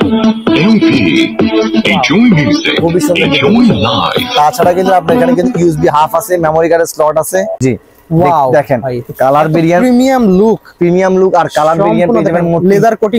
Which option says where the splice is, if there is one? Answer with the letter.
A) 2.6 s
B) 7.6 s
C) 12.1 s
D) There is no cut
B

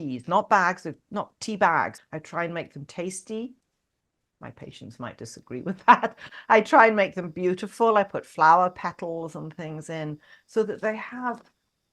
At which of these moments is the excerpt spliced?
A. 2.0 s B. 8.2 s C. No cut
A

